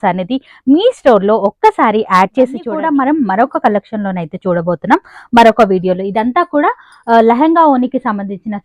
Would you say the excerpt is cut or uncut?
cut